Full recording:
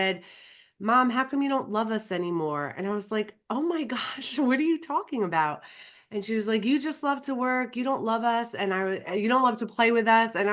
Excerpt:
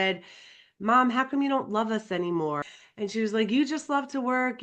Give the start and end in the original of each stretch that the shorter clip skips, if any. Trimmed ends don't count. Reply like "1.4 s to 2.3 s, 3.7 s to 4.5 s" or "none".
2.7 s to 5.8 s